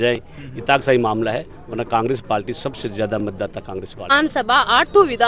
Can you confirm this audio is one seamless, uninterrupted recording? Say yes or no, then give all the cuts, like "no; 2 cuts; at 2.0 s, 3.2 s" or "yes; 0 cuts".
no; 1 cut; at 4.1 s